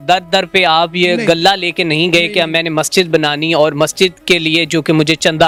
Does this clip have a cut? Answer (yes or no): no